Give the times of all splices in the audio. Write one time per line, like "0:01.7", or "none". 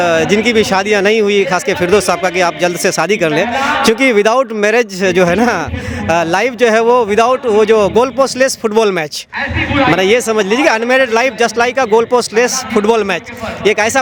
none